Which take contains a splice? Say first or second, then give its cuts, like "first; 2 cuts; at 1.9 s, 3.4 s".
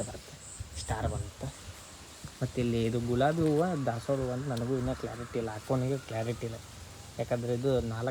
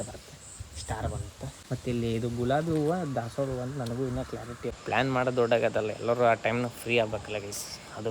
second; 2 cuts; at 1.6 s, 4.8 s